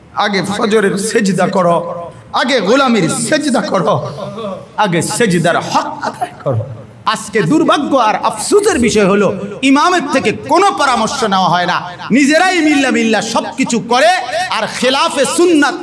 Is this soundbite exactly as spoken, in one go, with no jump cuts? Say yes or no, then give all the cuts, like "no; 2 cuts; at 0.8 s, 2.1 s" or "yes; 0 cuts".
no; 1 cut; at 6.9 s